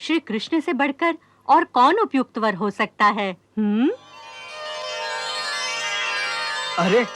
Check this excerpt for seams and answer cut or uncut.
uncut